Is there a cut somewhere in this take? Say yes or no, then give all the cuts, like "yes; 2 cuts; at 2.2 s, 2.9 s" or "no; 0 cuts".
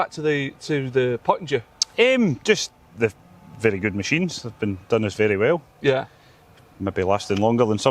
no; 0 cuts